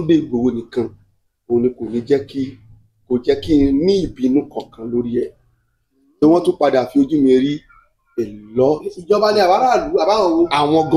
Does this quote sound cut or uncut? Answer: uncut